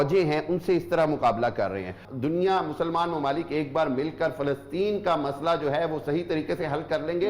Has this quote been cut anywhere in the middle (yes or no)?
yes